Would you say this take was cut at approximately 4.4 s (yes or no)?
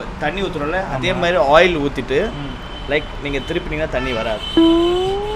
yes